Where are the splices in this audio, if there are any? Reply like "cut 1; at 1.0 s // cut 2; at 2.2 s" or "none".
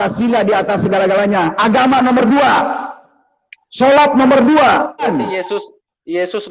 cut 1; at 5.0 s